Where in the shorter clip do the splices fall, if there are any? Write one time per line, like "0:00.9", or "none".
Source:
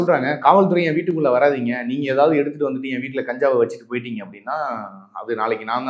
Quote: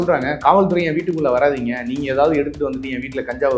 none

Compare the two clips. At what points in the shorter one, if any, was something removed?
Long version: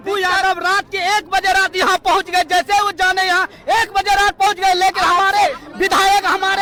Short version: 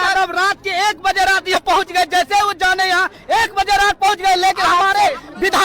0:01.6

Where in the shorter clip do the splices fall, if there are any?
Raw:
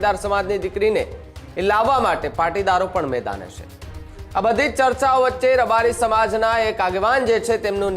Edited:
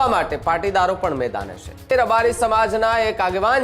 0:01.9

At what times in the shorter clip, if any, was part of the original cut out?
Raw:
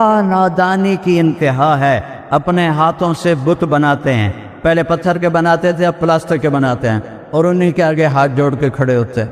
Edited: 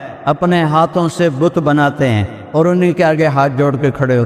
0:02.3

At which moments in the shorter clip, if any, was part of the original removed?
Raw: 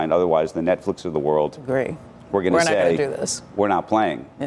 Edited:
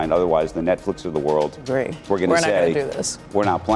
0:02.0

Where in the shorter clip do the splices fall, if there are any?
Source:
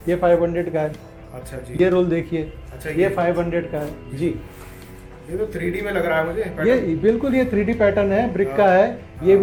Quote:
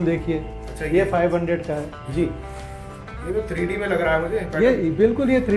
none

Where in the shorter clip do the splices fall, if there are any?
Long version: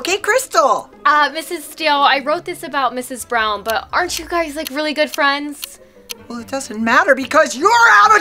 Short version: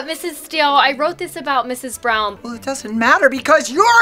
0:02.3

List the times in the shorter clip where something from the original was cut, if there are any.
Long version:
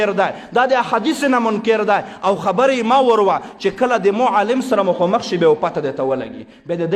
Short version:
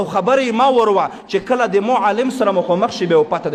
none

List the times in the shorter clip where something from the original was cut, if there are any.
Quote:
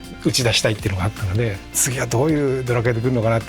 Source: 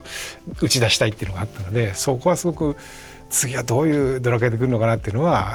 0:01.6

